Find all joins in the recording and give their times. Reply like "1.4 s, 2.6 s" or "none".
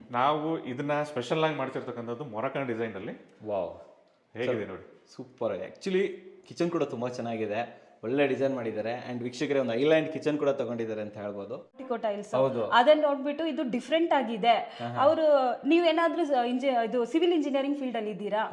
11.8 s